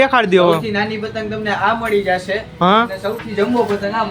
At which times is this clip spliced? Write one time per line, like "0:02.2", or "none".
none

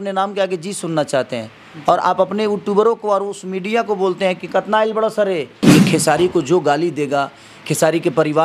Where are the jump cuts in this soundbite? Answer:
0:05.5

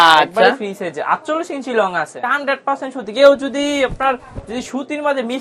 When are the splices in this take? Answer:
0:02.2

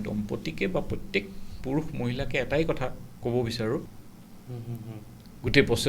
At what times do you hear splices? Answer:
0:03.9

